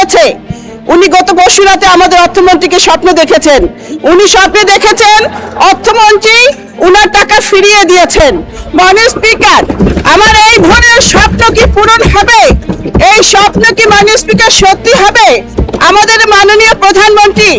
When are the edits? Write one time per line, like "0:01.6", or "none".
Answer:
0:15.6